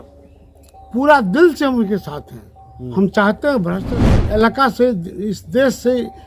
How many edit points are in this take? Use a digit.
1